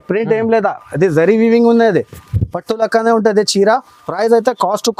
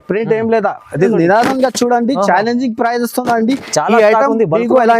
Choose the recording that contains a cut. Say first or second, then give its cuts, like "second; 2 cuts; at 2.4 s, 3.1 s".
second; 1 cut; at 1.1 s